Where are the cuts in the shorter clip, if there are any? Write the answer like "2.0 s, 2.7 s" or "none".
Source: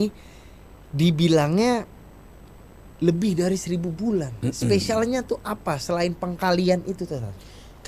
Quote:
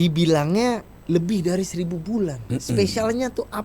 0.9 s